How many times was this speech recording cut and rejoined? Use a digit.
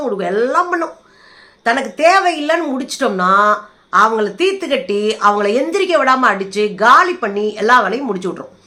0